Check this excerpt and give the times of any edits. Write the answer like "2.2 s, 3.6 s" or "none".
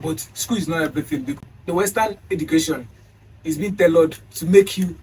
1.4 s